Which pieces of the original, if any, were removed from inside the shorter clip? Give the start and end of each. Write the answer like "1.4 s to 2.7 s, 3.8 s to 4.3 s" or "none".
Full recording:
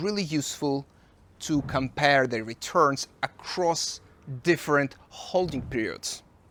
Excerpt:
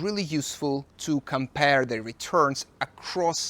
0.9 s to 1.3 s